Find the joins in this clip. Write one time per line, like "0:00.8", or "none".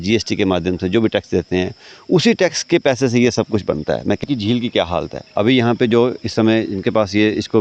0:04.2